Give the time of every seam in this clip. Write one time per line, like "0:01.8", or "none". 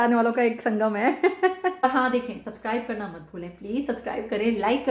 0:01.8